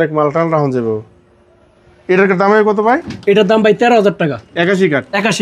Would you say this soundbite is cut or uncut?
uncut